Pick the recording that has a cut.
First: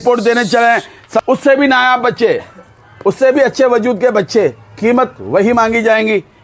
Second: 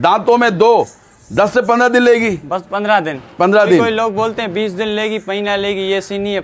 first; 1 cut; at 1.2 s

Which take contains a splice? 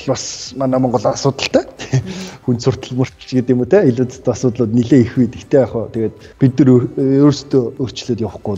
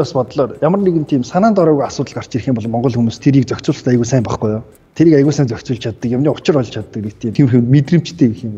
second; 1 cut; at 7.3 s

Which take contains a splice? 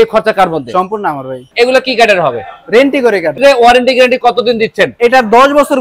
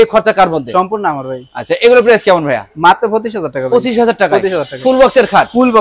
first; 2 cuts; at 1.4 s, 3.4 s

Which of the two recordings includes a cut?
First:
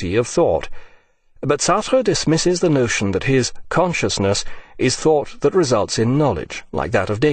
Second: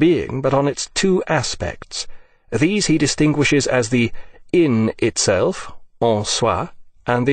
second; 1 cut; at 1.9 s

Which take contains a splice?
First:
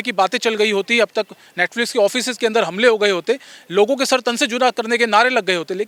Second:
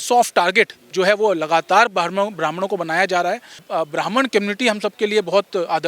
second; 1 cut; at 3.6 s

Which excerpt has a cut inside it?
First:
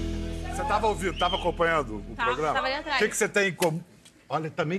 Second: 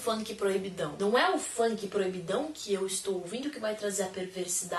second; 1 cut; at 1.2 s

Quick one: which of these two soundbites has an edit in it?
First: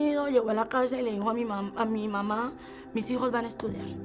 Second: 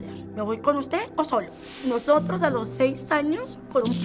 second; 1 cut; at 1.6 s

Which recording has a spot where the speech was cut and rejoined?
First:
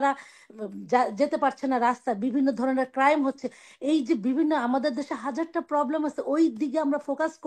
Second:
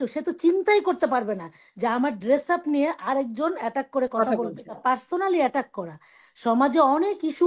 second; 1 cut; at 4.8 s

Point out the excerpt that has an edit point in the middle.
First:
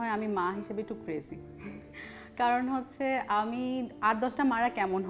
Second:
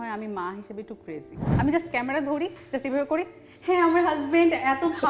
second; 1 cut; at 1.4 s

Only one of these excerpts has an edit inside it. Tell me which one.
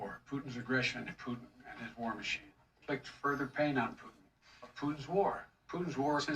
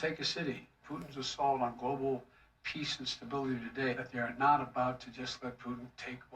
second; 2 cuts; at 0.9 s, 3.9 s

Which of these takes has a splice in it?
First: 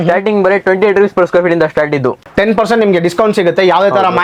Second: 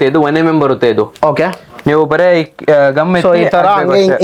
first; 1 cut; at 2.2 s

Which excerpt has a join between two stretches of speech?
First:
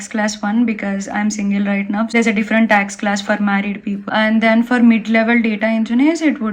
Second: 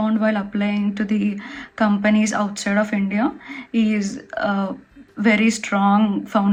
first; 2 cuts; at 2.1 s, 4.0 s

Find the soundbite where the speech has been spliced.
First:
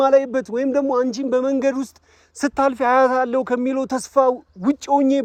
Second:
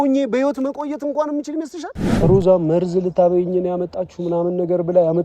second; 1 cut; at 2.0 s

